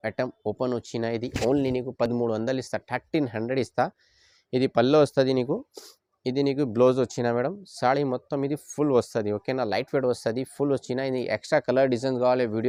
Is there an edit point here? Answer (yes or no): no